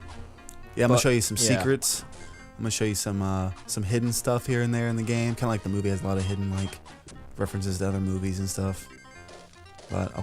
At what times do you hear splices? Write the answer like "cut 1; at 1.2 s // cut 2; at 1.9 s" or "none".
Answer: cut 1; at 5.8 s